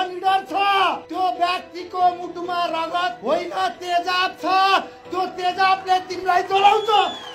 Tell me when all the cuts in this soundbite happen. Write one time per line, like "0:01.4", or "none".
0:01.0
0:03.2